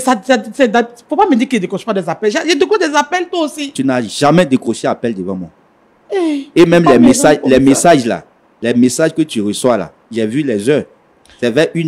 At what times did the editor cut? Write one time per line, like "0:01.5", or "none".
none